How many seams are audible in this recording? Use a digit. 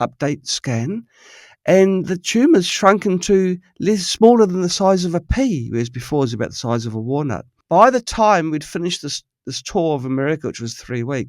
1